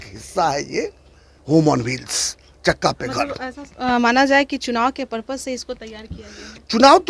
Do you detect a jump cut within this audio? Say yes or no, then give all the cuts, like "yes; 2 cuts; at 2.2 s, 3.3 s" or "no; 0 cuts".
no; 0 cuts